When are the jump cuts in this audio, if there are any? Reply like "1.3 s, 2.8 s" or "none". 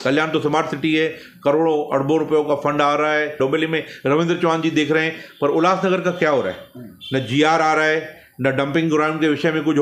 3.3 s